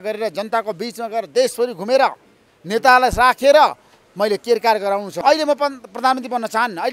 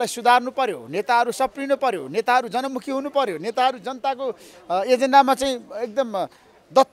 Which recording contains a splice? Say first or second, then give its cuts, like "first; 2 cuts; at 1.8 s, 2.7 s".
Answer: first; 1 cut; at 5.1 s